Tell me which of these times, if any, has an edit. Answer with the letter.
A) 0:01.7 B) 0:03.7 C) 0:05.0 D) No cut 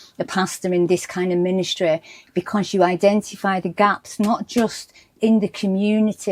D